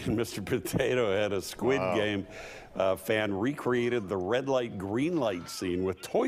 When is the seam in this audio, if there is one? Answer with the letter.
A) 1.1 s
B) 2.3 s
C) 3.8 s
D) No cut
D